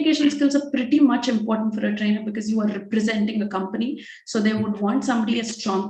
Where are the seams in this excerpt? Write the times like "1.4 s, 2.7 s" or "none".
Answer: none